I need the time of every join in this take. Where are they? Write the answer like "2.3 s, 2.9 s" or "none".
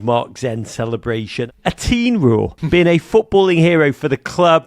1.4 s, 2.6 s